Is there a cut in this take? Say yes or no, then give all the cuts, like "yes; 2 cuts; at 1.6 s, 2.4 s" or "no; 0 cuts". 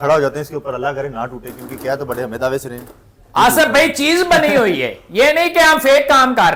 no; 0 cuts